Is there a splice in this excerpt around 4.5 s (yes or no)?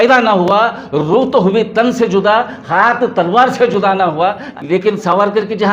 yes